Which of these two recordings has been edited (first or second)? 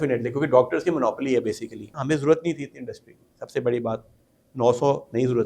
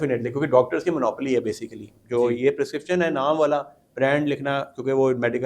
first